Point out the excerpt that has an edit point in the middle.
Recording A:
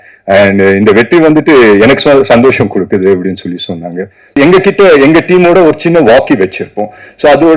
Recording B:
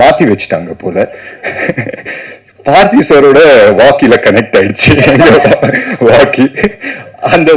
A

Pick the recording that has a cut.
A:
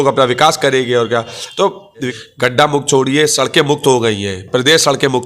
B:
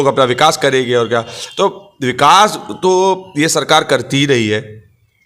A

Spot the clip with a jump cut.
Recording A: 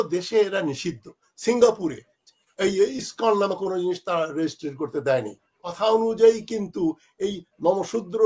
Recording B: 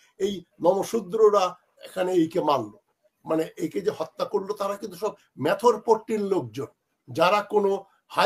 A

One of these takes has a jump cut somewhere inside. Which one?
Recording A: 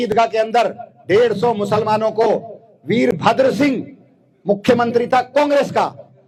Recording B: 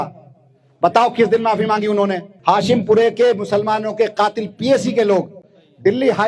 B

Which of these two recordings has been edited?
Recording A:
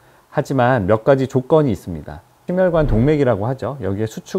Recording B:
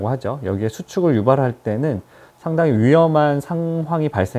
A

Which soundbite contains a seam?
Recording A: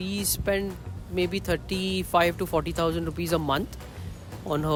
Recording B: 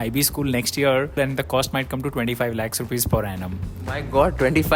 B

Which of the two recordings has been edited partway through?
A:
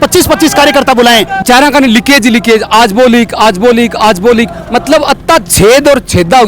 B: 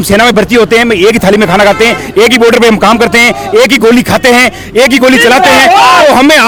A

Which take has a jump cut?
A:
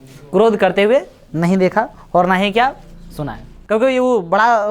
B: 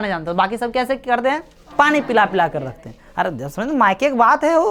A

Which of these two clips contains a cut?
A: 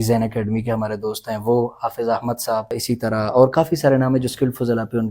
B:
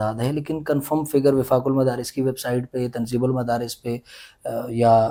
A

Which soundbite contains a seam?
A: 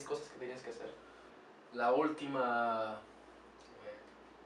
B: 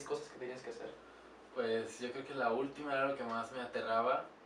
A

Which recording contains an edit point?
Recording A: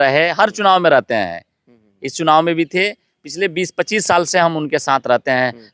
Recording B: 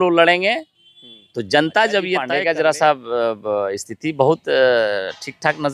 B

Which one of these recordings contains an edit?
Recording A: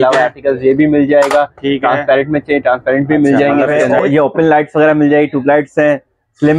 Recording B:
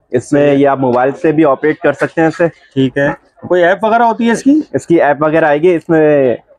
A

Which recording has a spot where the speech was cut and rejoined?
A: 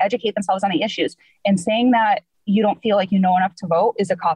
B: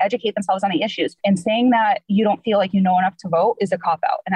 B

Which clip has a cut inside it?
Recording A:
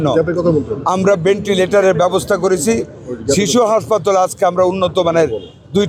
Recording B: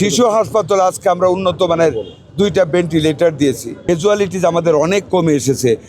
B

